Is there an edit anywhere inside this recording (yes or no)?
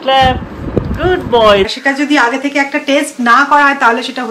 yes